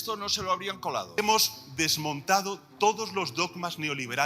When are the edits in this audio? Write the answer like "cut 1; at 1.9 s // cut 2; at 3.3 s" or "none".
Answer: cut 1; at 1.2 s